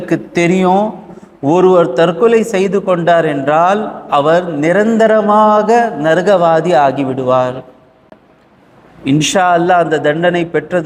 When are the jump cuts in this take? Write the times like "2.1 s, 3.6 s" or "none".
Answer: none